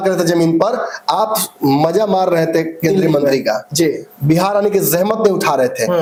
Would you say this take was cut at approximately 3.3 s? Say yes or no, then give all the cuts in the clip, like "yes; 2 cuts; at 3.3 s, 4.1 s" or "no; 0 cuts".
no; 0 cuts